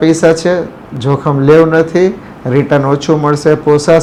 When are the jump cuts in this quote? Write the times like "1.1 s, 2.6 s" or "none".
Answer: none